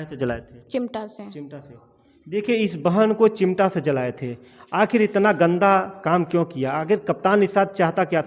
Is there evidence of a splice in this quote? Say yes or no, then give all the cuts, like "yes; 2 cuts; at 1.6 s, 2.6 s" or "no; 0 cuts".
no; 0 cuts